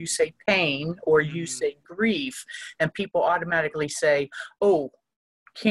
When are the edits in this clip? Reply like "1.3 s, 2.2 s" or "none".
none